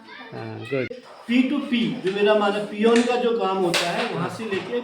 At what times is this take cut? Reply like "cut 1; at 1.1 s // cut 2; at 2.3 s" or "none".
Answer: cut 1; at 1.1 s